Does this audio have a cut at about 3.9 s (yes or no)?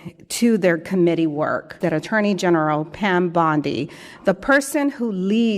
no